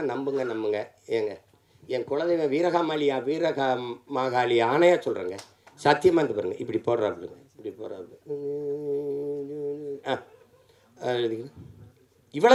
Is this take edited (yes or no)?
no